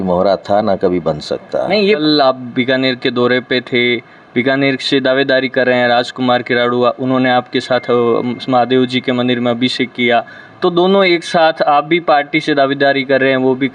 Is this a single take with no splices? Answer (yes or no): no